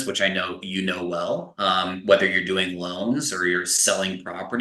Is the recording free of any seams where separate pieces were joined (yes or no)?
yes